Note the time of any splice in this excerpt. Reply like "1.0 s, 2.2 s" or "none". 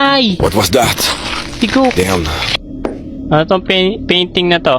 2.4 s